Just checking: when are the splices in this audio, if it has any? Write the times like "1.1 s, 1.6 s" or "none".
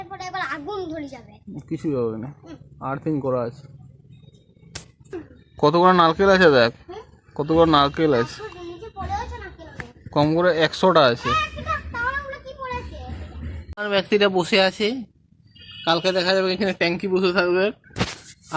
5.1 s, 13.7 s

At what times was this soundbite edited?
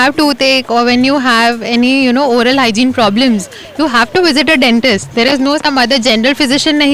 none

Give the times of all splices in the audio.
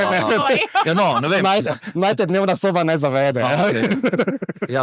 none

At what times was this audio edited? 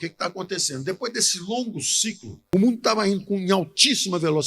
2.4 s

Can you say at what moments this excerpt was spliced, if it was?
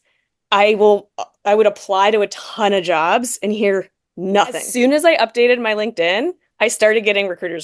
4.7 s

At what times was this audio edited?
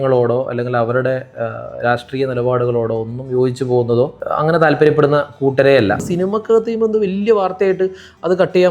4.2 s, 6.1 s

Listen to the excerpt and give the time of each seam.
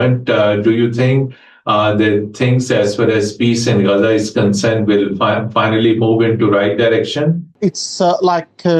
7.5 s

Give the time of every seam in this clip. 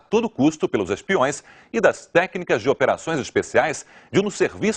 3.0 s

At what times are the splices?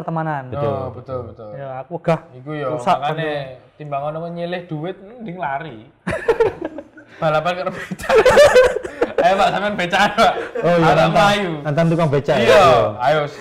none

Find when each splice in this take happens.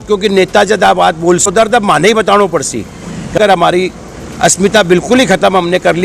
1.5 s, 3.3 s

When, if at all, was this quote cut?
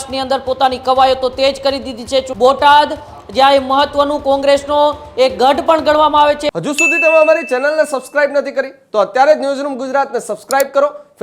2.3 s, 6.4 s

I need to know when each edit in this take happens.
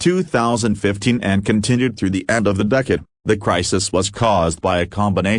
none

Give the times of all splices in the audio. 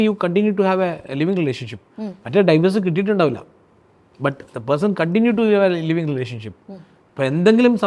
none

